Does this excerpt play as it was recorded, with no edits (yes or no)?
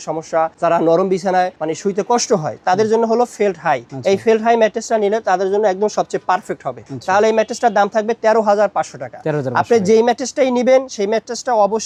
yes